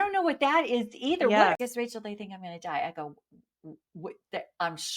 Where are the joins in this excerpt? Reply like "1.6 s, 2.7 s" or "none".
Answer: 1.6 s